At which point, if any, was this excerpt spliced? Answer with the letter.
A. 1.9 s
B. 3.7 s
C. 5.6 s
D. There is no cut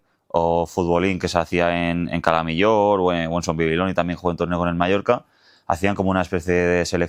D